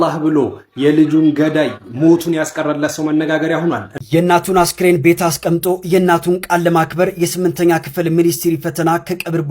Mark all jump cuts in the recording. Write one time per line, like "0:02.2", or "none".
0:03.9